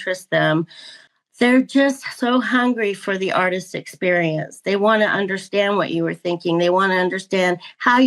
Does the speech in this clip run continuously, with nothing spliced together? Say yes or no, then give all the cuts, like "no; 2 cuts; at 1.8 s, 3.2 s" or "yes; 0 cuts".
yes; 0 cuts